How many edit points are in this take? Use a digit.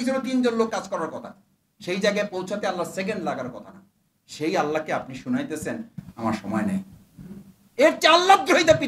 1